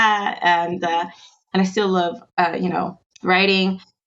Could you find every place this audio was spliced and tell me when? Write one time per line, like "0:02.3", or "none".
0:03.0

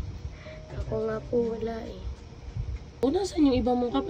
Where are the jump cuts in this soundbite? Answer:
0:02.8

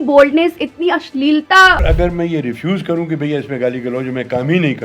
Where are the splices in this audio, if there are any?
0:01.8

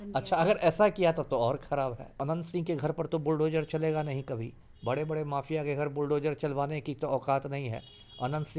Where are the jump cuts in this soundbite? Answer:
0:02.1

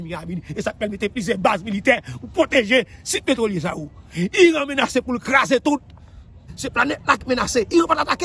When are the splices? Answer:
0:06.5

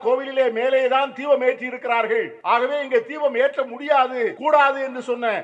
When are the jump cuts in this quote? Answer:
0:02.3
0:04.4

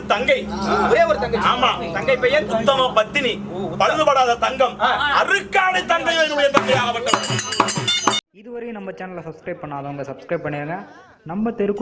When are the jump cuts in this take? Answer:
0:08.3

